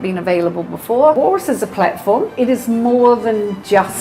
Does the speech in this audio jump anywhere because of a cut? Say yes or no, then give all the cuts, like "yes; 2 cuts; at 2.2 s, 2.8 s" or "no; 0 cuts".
yes; 2 cuts; at 1.1 s, 2.3 s